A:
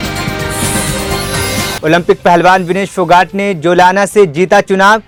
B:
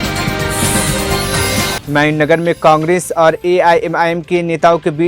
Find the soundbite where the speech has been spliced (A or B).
B